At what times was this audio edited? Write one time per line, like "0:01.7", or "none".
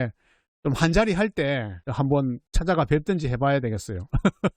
0:01.8
0:02.5

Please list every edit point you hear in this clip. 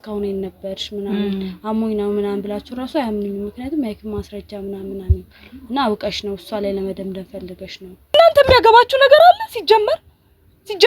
0:08.1

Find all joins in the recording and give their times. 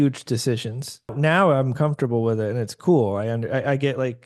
0:01.1

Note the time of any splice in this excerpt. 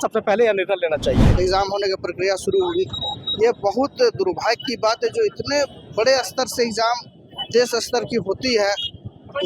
0:01.2

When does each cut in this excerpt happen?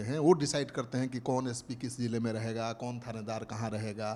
none

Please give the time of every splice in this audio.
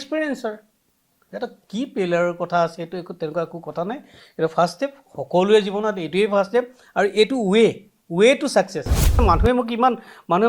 0:09.2

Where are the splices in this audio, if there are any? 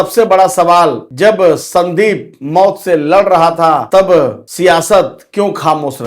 0:01.1
0:04.2

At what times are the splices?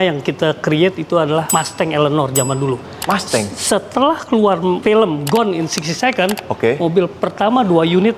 none

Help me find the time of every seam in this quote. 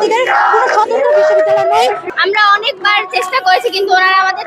0:02.1

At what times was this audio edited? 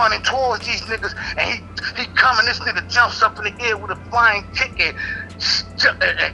none

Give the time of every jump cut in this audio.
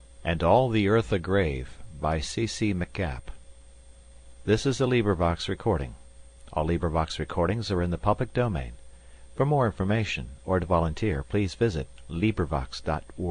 none

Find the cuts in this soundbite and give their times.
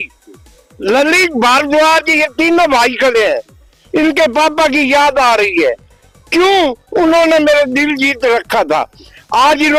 none

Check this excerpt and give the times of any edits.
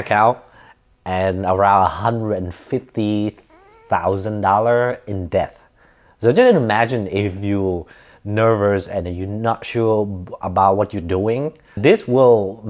none

